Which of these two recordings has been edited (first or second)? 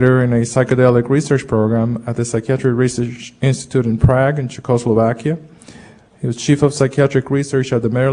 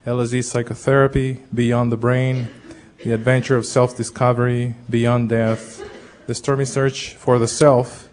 first